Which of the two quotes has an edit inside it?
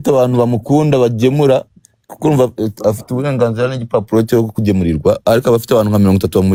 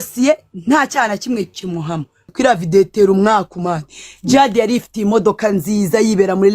second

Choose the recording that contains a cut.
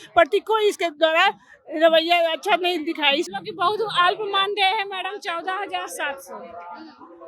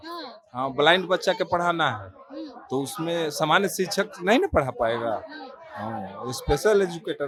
first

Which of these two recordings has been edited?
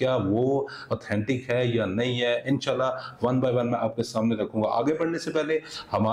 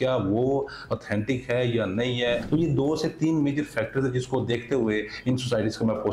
second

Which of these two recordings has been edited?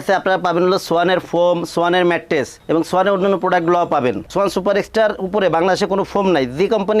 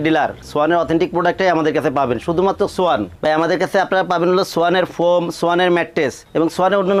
first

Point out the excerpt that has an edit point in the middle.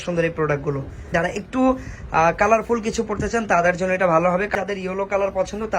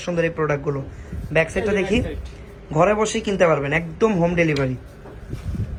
first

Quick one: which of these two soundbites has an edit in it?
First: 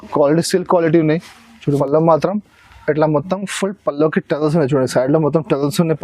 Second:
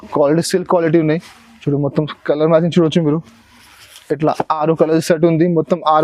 first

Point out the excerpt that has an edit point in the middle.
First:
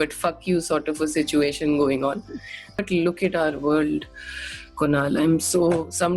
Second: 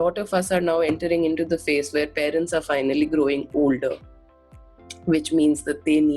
first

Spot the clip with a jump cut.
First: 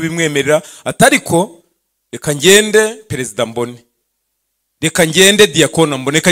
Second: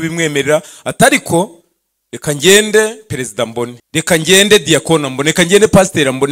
second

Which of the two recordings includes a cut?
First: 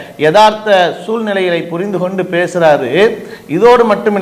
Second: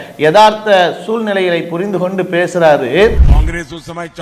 second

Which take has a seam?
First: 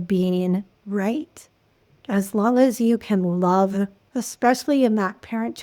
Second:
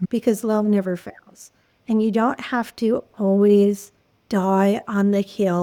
first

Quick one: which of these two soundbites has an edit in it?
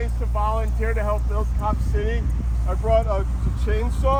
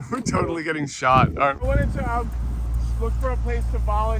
second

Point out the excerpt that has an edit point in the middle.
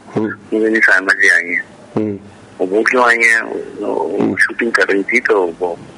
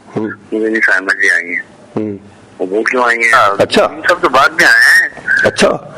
second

